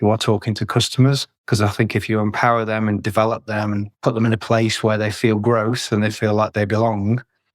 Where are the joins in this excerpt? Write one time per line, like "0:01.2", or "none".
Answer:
0:01.3
0:03.9